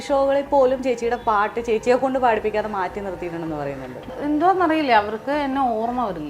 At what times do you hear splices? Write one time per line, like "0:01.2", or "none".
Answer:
0:04.1